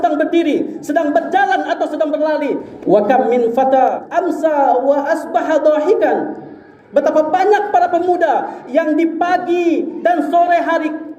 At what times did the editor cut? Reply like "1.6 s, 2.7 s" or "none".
2.7 s, 4.1 s